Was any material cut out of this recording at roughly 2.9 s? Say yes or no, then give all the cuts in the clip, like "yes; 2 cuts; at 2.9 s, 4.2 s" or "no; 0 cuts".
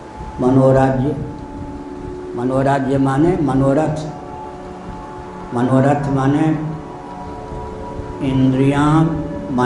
no; 0 cuts